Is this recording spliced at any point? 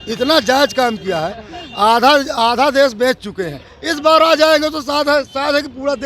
no; 0 cuts

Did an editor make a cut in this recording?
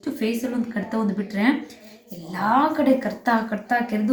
no; 0 cuts

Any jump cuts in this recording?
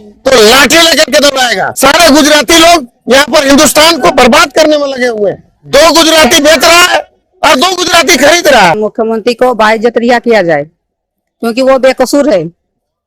yes; 2 cuts; at 1.7 s, 8.8 s

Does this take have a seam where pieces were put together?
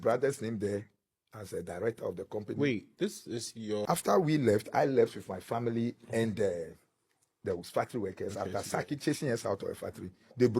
yes; 1 cut; at 3.9 s

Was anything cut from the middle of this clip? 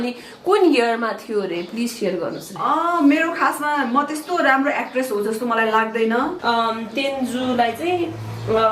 yes; 1 cut; at 6.4 s

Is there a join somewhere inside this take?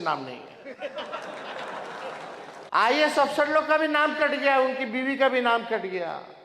yes; 1 cut; at 2.6 s

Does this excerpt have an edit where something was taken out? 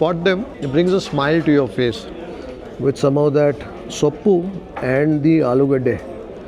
no; 0 cuts

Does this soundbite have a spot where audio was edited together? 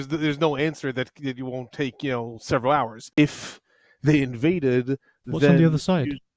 yes; 1 cut; at 3.2 s

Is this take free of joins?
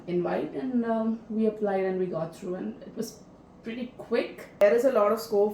no; 1 cut; at 4.6 s

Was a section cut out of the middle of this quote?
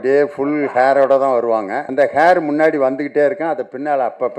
yes; 1 cut; at 1.8 s

